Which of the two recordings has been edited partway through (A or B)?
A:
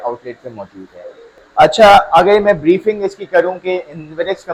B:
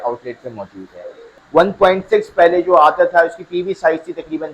B